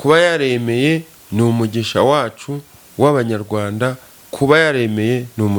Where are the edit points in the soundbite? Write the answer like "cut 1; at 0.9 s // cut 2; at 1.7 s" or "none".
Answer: none